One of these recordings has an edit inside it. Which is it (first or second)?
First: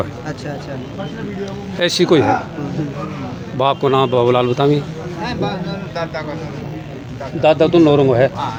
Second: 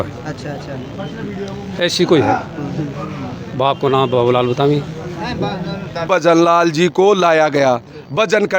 second